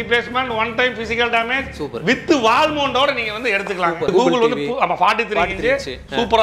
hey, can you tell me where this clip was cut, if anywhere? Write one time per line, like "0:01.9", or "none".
0:04.1

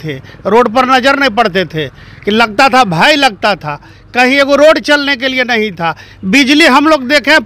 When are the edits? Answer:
none

